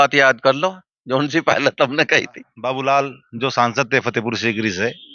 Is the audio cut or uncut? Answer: cut